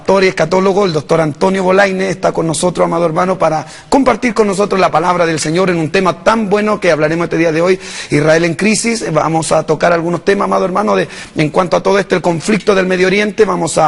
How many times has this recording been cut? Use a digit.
1